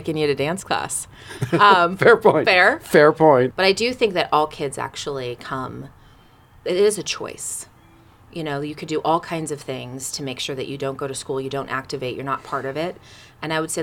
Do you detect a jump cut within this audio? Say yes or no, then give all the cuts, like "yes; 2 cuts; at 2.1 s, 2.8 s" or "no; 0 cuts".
yes; 1 cut; at 3.5 s